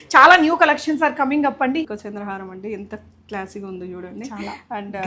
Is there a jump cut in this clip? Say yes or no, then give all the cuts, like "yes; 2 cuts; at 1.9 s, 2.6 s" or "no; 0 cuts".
yes; 1 cut; at 1.9 s